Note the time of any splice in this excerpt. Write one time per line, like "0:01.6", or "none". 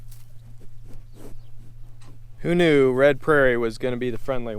0:02.3